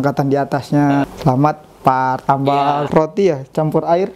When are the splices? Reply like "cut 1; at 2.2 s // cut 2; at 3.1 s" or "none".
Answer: cut 1; at 1.1 s // cut 2; at 2.9 s